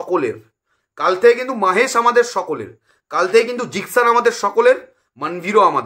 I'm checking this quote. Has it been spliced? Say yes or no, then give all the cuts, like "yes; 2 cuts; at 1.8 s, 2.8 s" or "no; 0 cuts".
no; 0 cuts